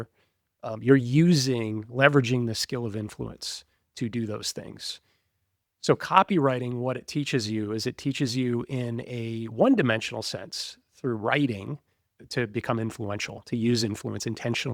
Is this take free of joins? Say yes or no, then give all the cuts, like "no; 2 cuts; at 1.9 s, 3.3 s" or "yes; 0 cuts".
no; 1 cut; at 12.1 s